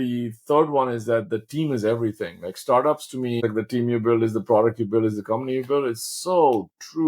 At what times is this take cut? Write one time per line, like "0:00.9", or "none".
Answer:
0:03.4

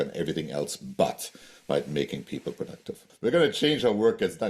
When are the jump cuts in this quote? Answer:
0:03.0

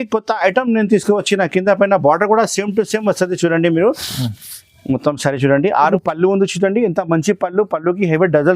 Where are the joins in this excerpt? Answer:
0:05.9

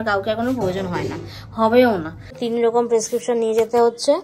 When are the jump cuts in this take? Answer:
0:02.4

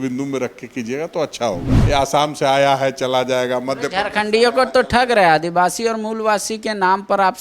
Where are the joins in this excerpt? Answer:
0:01.7

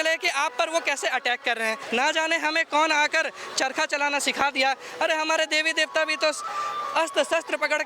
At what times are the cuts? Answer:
0:01.8

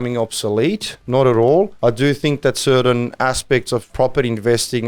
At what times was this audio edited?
0:00.9
0:01.7
0:03.9

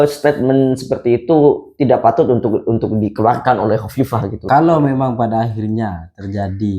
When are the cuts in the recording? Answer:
0:04.4

